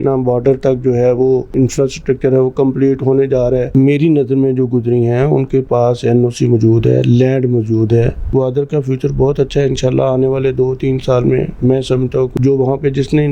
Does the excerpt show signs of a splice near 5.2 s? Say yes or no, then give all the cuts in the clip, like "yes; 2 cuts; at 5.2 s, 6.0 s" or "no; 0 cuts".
no; 4 cuts; at 1.5 s, 3.7 s, 8.3 s, 12.3 s